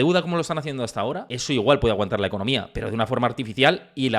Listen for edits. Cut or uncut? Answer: cut